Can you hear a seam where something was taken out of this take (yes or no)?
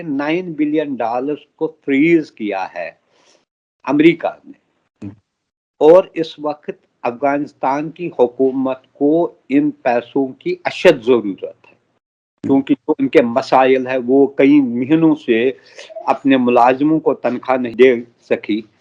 yes